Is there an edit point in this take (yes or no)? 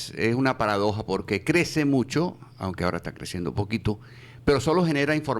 no